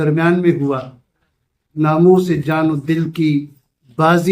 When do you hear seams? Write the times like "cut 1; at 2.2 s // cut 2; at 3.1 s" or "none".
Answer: cut 1; at 1.7 s